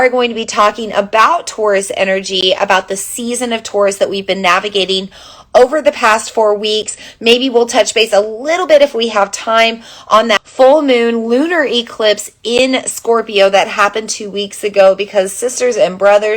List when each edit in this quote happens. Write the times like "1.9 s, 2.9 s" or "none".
10.5 s